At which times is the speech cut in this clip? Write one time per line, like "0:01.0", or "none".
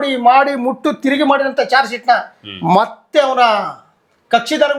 none